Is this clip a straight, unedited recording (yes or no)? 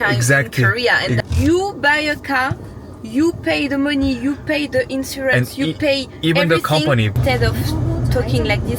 no